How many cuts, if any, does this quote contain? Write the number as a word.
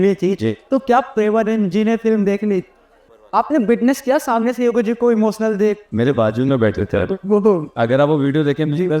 one